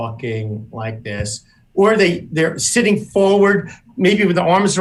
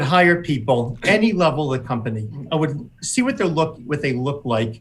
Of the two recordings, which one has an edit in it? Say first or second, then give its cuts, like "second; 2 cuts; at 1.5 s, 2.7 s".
second; 2 cuts; at 0.9 s, 2.4 s